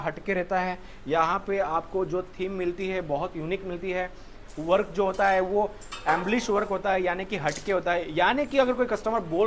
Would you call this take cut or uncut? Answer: uncut